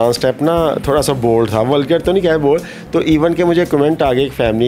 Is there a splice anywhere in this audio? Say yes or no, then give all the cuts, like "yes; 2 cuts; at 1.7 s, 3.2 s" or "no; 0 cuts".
no; 0 cuts